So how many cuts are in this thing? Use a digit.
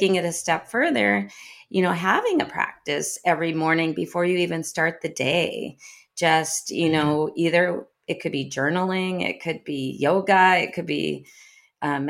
0